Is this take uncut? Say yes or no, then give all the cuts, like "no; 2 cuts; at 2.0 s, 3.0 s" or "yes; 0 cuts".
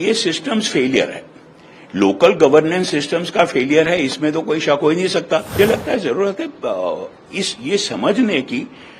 no; 1 cut; at 5.6 s